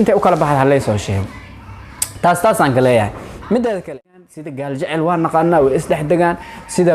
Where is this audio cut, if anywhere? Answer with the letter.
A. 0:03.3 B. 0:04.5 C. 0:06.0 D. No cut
B